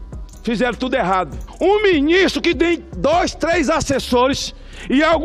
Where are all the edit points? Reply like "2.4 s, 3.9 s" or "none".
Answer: 1.4 s

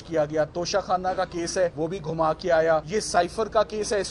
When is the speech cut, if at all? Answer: 1.7 s, 2.9 s

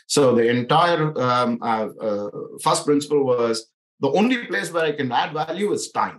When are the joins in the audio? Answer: none

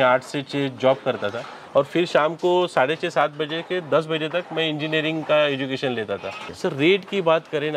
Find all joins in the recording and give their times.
6.5 s

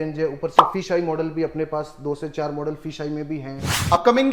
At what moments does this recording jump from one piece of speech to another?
none

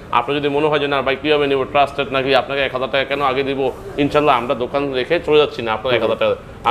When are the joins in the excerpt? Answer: none

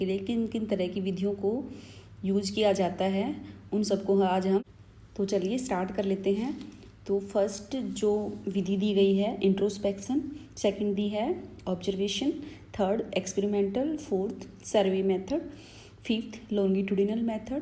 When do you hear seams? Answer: 4.6 s

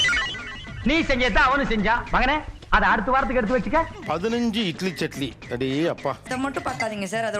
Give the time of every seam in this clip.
3.9 s, 6.0 s

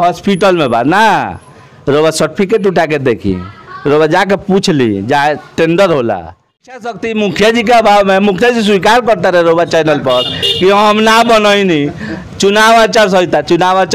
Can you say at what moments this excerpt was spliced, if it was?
6.9 s

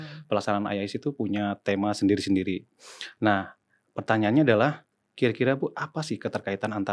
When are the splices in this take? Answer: none

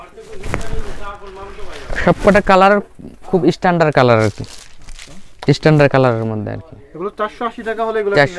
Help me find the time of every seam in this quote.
none

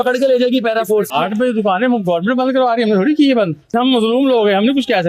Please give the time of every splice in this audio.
1.1 s, 3.7 s

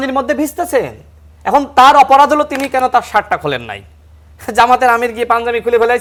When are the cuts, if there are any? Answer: none

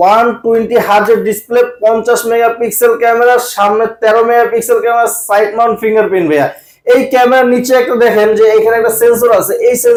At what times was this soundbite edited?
none

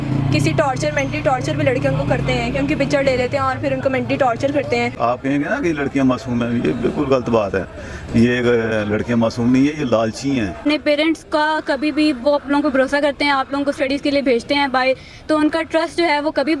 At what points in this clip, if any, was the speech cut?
4.9 s, 10.6 s

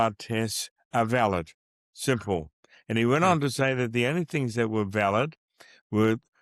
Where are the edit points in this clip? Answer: none

